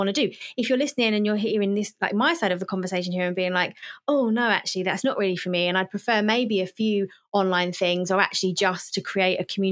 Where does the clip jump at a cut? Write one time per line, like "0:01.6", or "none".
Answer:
none